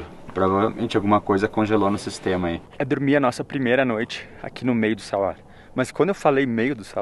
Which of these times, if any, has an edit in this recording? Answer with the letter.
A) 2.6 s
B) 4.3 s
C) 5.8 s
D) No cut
A